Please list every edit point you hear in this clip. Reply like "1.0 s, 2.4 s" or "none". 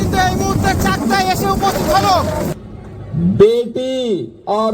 2.5 s